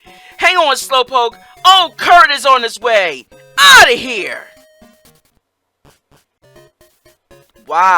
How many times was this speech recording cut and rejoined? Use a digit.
1